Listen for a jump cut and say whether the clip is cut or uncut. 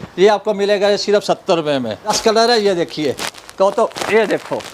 cut